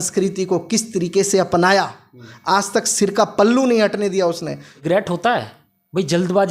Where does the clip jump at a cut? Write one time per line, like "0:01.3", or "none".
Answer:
0:04.7